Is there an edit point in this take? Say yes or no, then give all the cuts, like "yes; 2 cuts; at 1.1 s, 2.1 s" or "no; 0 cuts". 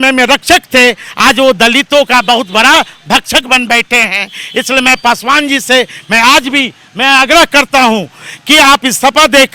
no; 0 cuts